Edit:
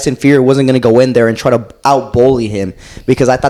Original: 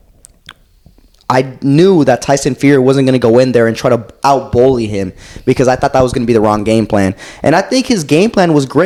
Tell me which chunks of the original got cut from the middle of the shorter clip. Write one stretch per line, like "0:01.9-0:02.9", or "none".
none